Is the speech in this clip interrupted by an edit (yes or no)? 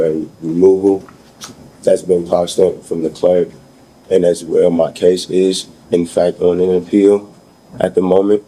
no